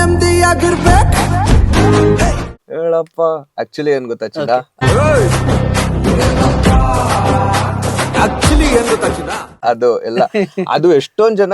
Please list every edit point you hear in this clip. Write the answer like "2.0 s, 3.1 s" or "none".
2.3 s, 4.7 s, 9.5 s